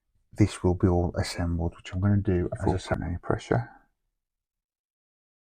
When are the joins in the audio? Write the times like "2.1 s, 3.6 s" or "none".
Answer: 2.6 s